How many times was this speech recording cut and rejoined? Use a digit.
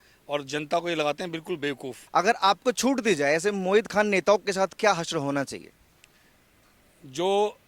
1